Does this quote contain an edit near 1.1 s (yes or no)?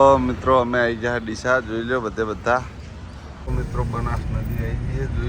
no